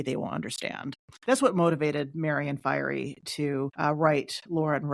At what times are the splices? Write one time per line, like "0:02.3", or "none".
0:01.1
0:03.7